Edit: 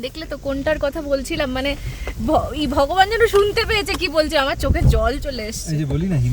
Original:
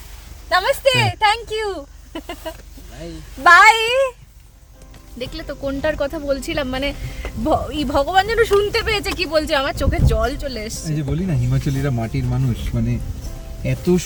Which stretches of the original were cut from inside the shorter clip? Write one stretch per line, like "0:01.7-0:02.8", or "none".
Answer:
none

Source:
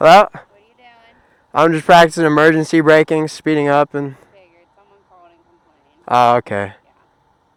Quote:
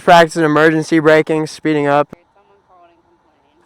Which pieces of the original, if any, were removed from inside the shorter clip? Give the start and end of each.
0:03.9-0:04.5

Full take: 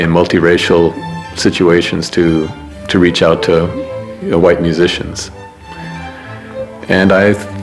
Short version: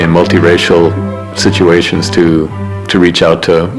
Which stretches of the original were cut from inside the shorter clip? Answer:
none

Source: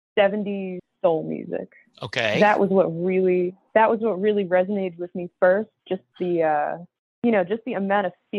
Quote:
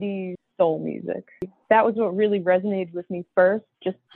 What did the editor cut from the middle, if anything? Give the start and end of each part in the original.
0:02.0-0:03.6

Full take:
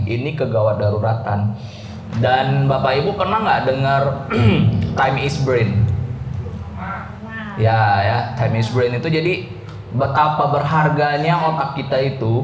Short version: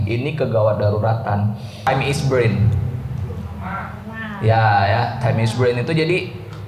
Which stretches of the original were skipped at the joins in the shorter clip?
0:01.9-0:05.0

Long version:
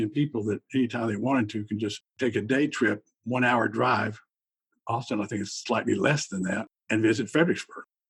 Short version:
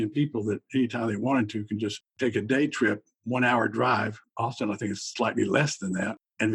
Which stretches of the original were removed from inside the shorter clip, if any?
0:04.2-0:04.7

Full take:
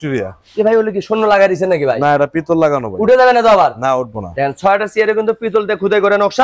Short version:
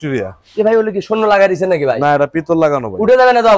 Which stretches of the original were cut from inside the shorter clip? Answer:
none

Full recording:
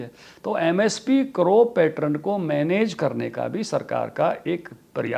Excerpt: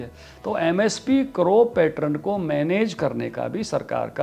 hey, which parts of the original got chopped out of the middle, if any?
none

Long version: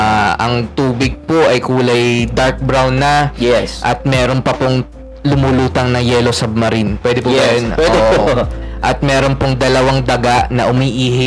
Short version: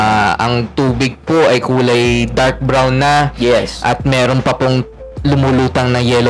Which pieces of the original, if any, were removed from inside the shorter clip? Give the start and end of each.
none

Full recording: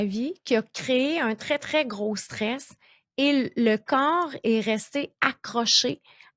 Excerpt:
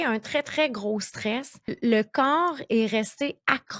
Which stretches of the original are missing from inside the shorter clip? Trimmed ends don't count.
0:02.9-0:03.5

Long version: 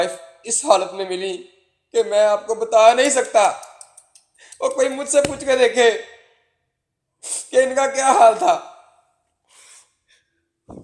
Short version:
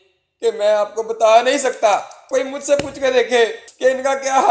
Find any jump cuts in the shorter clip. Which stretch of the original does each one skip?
0:03.8-0:04.7
0:06.1-0:07.4

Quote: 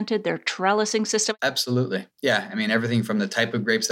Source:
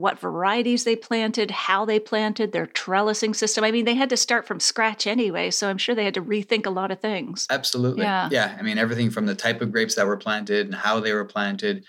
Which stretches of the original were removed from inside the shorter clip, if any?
0:03.6-0:07.4

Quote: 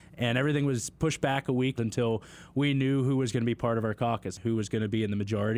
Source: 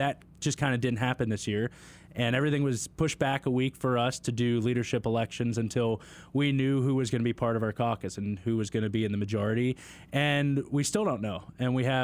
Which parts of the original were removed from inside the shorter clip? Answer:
0:03.8-0:05.6
0:08.2-0:08.4

